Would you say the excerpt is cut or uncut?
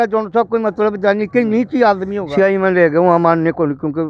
cut